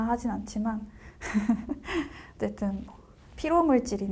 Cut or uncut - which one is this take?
uncut